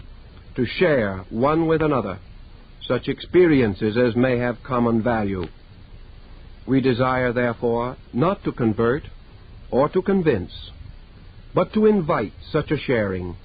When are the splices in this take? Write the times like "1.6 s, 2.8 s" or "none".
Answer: 11.7 s

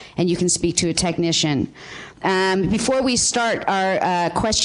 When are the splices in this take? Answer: 2.6 s

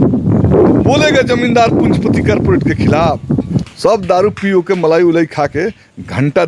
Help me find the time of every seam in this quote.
3.6 s

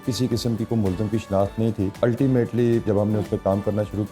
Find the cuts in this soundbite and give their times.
2.0 s, 2.9 s

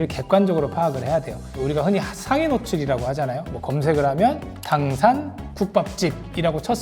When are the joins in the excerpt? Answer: 1.5 s

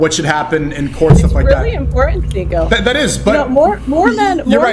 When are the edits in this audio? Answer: 2.2 s

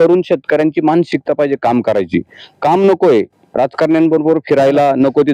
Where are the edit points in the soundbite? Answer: none

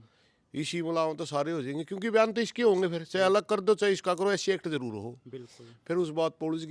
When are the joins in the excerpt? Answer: none

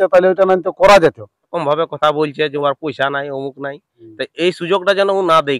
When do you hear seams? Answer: 1.5 s

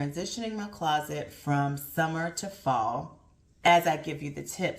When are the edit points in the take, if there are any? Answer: 3.6 s

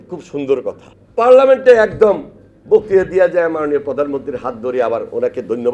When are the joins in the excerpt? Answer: 0.9 s

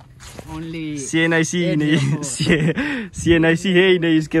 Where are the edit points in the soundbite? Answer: none

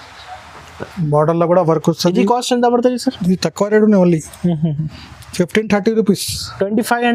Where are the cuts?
none

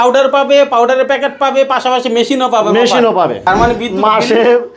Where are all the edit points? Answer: 3.4 s

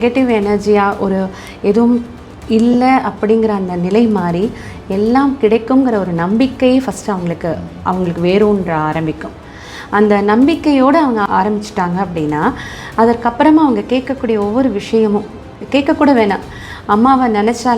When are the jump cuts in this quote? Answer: 11.2 s

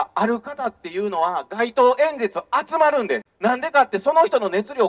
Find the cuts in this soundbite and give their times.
3.3 s

